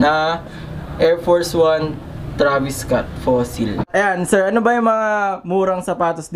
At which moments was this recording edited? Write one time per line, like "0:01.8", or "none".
0:03.9